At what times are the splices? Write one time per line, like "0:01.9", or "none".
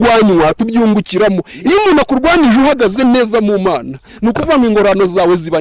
none